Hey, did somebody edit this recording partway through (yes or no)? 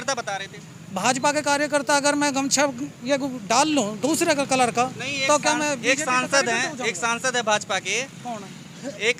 no